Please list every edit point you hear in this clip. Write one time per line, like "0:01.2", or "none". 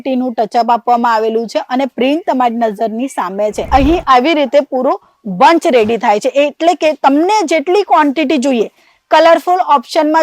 0:03.7